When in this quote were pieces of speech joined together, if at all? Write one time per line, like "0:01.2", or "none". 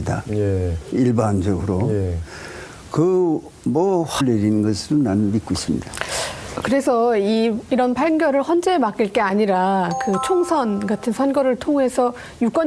none